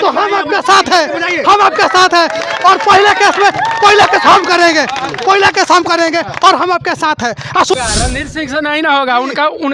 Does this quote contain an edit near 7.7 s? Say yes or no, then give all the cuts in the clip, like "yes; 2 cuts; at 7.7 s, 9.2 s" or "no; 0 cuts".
yes; 1 cut; at 7.7 s